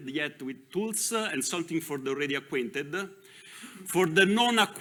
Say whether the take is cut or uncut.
uncut